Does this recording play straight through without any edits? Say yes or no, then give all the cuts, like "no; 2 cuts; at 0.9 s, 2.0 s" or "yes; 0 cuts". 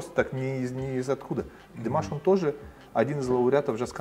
yes; 0 cuts